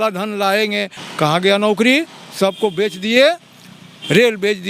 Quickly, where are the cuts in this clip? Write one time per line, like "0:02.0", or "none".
0:01.0